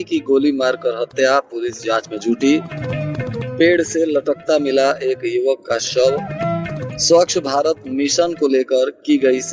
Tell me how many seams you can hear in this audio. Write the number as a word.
zero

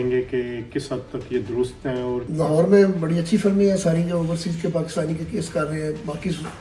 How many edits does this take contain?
one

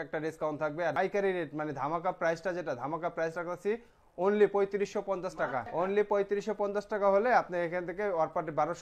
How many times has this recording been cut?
two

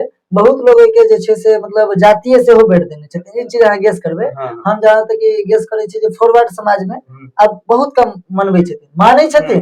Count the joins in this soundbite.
zero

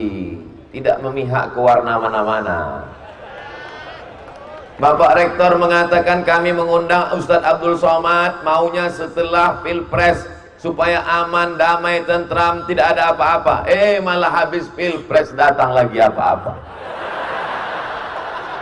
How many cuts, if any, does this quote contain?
zero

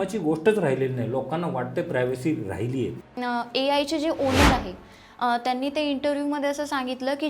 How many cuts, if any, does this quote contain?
one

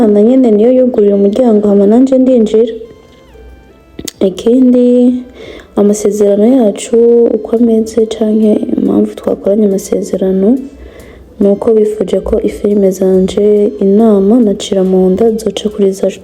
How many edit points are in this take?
zero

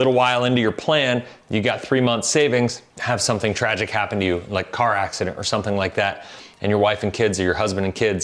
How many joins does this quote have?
one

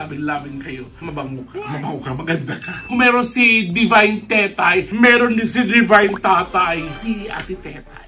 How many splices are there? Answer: two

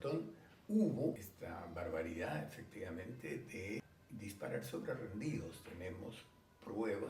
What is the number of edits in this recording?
two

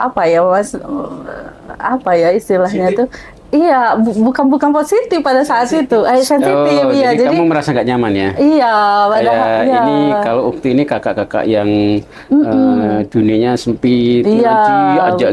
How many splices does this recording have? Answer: zero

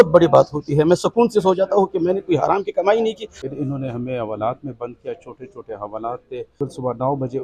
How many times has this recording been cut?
two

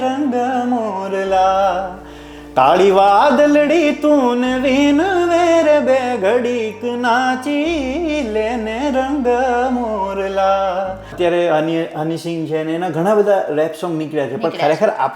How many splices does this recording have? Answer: one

